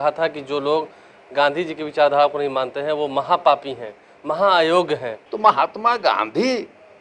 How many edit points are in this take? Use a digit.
1